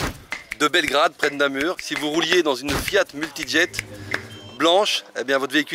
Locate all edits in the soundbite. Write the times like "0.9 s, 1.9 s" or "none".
1.8 s